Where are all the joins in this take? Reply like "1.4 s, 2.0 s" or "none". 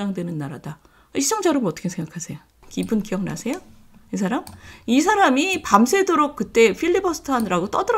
2.6 s